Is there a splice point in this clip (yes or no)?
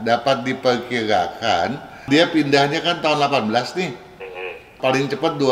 yes